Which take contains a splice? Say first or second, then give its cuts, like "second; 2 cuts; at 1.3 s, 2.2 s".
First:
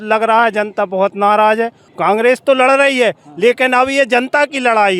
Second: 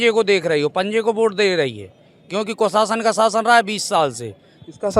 first; 1 cut; at 1.8 s